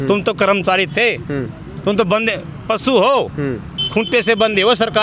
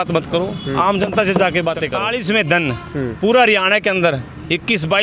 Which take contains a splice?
second; 1 cut; at 2.0 s

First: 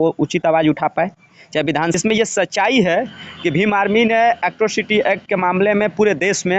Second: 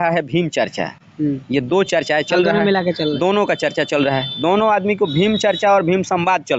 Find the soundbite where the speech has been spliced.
first; 1 cut; at 2.0 s

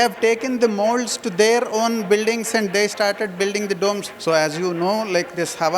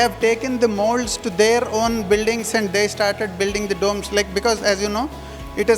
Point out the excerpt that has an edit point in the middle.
first; 1 cut; at 4.0 s

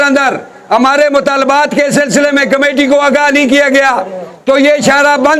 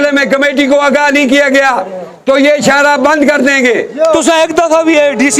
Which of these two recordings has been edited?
second; 1 cut; at 4.2 s

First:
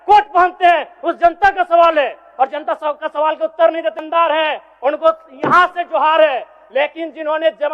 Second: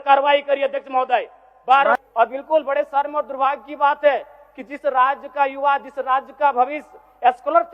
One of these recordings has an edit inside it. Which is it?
second; 1 cut; at 2.0 s

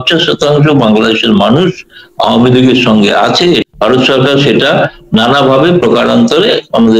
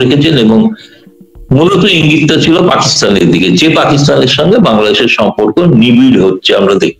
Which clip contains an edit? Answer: first; 1 cut; at 3.6 s

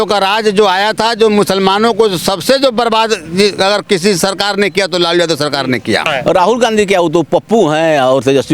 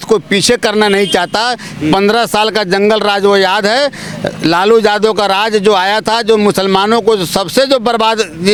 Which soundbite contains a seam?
first; 1 cut; at 6.1 s

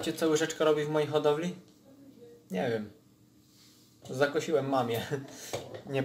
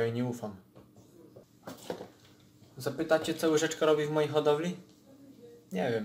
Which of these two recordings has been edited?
second; 1 cut; at 1.4 s

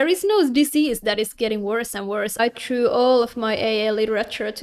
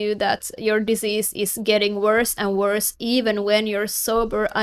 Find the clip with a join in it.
first; 1 cut; at 2.4 s

